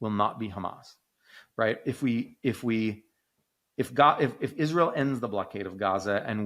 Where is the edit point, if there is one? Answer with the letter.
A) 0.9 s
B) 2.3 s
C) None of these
C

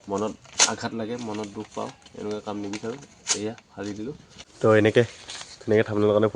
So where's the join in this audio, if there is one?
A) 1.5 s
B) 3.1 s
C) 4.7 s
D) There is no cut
C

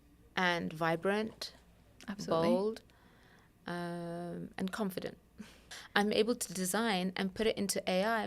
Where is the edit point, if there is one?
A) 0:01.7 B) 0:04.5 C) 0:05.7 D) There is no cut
C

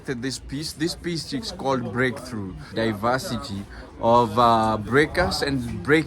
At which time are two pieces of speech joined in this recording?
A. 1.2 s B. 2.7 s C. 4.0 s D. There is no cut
B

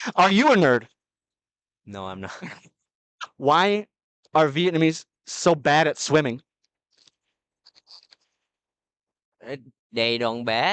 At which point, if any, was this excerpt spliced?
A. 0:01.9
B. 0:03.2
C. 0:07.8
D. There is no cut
B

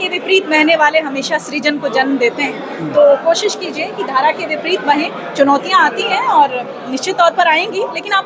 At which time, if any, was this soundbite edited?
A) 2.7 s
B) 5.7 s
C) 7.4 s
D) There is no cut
D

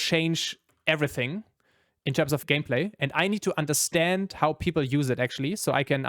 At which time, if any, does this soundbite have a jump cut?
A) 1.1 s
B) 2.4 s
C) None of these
B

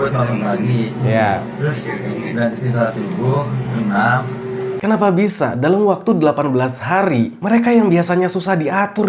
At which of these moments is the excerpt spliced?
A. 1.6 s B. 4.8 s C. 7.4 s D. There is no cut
B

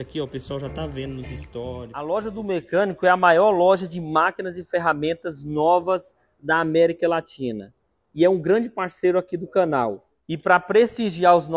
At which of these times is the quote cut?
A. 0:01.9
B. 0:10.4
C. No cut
A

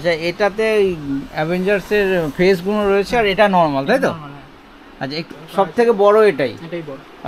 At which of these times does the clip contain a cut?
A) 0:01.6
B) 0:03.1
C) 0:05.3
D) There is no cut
C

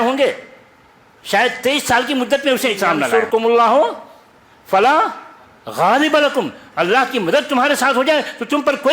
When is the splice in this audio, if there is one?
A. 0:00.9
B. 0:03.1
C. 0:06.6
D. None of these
B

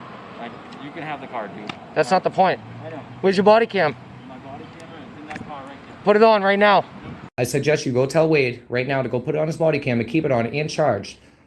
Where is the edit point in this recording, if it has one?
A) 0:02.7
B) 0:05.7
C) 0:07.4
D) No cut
C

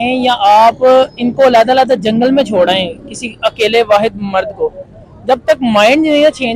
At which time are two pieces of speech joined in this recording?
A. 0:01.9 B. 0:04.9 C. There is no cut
C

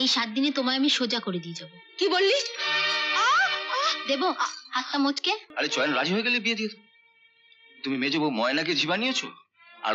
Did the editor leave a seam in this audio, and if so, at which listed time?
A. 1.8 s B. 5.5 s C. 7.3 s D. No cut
B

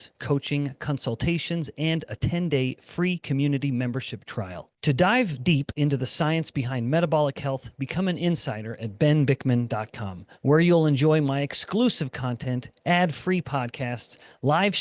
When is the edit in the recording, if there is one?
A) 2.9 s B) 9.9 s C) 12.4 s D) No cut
D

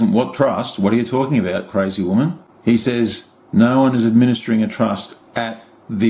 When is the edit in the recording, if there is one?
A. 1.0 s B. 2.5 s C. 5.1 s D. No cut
B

